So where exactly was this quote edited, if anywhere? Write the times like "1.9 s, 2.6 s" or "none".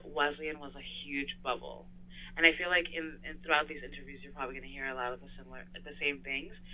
none